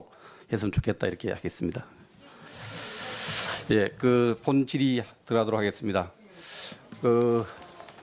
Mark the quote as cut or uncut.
uncut